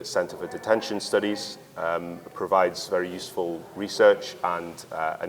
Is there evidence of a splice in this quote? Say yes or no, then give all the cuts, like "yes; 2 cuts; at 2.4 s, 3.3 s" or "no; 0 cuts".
no; 0 cuts